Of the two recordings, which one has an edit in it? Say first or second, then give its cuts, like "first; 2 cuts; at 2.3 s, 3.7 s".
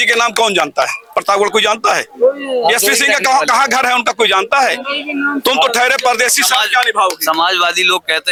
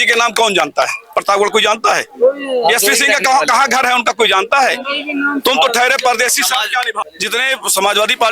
second; 1 cut; at 6.9 s